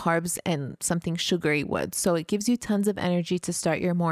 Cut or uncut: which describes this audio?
uncut